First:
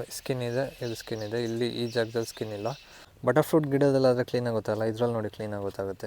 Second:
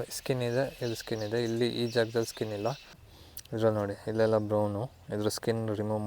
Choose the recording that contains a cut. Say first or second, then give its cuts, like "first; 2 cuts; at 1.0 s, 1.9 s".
second; 1 cut; at 3.1 s